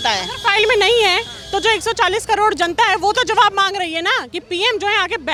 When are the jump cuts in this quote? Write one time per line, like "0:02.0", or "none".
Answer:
none